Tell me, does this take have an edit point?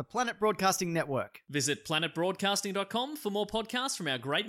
no; 0 cuts

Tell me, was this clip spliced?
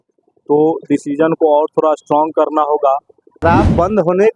yes; 1 cut; at 3.4 s

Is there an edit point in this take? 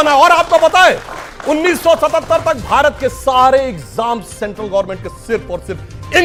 no; 0 cuts

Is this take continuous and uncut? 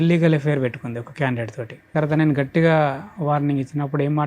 no; 1 cut; at 1.9 s

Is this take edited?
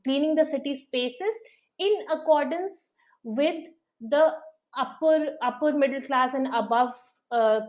no; 0 cuts

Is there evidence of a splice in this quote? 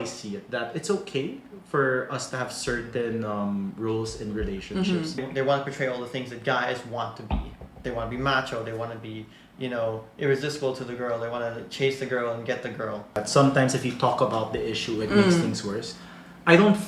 yes; 2 cuts; at 5.2 s, 13.2 s

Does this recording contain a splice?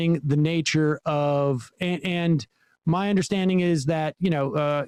no; 0 cuts

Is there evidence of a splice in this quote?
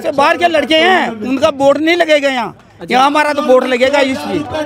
no; 0 cuts

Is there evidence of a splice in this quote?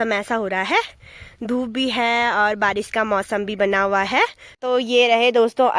yes; 1 cut; at 4.5 s

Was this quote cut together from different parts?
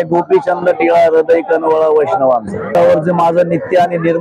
yes; 1 cut; at 2.7 s

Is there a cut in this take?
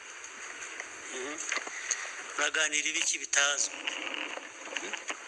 yes; 1 cut; at 4.3 s

